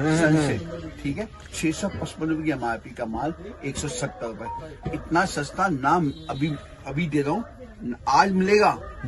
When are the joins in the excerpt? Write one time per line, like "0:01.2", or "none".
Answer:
none